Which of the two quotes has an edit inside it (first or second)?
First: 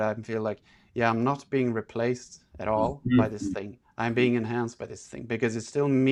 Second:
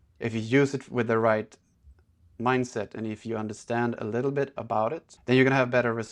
second